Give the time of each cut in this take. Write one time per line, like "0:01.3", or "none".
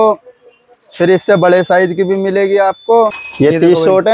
0:03.2